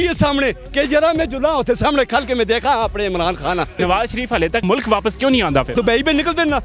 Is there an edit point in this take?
yes; 2 cuts; at 3.7 s, 5.7 s

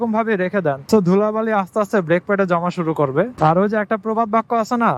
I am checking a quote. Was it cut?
yes; 2 cuts; at 0.8 s, 3.3 s

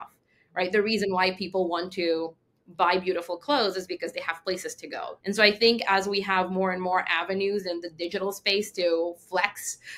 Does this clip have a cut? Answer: yes; 1 cut; at 5.1 s

